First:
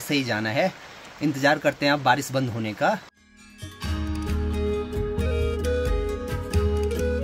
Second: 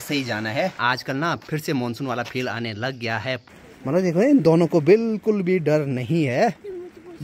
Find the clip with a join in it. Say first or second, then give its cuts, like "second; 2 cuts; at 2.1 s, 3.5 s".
second; 2 cuts; at 0.8 s, 3.5 s